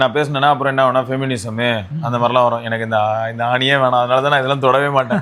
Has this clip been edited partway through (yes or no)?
no